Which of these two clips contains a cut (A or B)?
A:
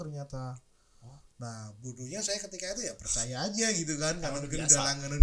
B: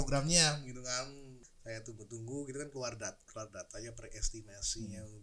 B